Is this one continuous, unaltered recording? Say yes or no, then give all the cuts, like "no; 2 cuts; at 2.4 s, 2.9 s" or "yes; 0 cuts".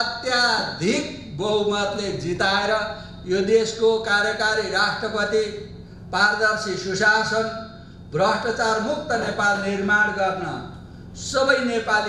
yes; 0 cuts